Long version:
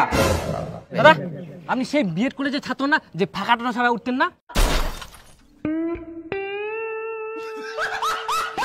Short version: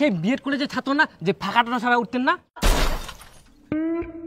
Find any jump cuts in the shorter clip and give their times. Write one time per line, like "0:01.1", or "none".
none